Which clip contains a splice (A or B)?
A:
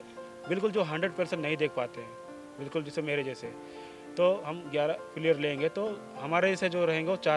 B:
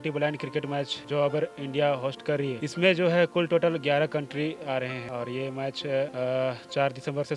B